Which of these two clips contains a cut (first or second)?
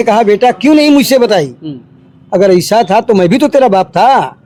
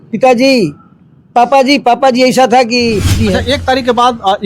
second